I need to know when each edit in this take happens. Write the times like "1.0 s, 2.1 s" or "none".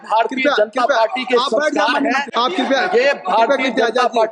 2.3 s